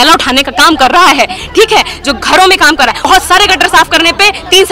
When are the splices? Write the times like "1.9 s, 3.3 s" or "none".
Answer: 3.1 s

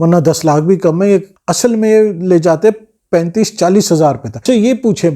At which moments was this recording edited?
1.4 s, 4.4 s

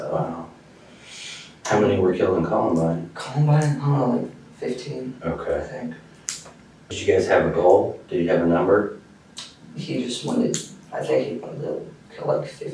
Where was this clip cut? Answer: 6.9 s

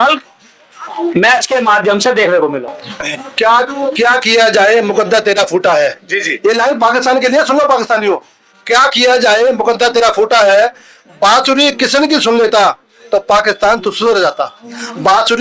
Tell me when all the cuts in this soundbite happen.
2.8 s

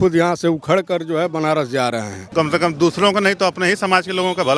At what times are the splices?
2.2 s

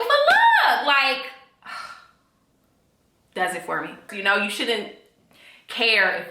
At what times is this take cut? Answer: 4.1 s

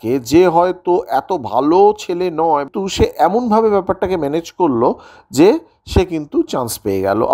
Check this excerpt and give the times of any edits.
2.7 s

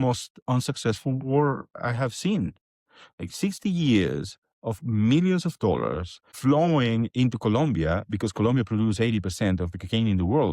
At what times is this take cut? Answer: 6.2 s

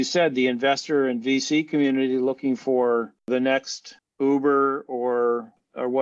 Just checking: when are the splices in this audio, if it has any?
3.4 s

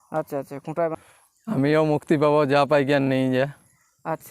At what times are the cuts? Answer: 1.0 s

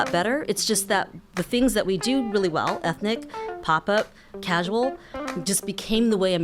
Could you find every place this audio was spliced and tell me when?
none

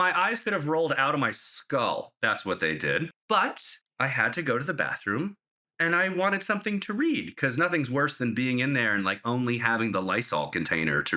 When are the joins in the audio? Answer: 3.2 s

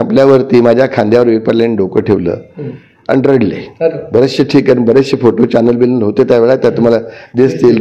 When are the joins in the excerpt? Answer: none

